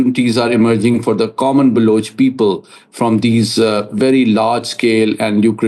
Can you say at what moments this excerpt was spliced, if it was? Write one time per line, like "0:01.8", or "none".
none